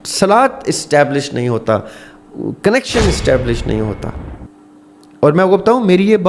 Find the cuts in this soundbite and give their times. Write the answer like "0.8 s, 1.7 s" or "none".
4.3 s

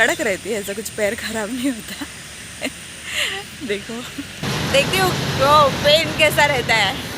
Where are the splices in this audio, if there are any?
4.4 s

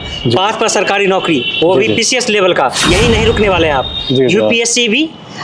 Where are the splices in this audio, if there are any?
2.8 s

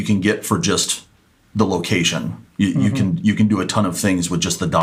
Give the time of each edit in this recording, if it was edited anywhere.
none

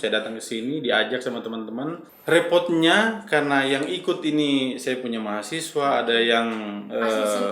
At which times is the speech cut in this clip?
2.1 s

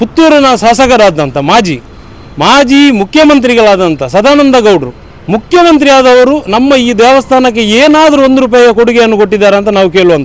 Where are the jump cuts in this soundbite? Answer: none

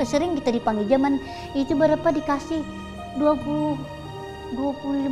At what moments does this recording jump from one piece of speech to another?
none

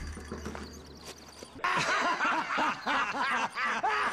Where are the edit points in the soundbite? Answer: 1.6 s

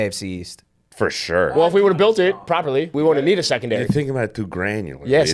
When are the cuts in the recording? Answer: 1.5 s, 2.9 s

